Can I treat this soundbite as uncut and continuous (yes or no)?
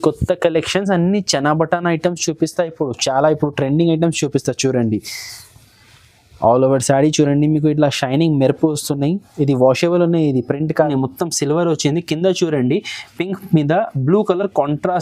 no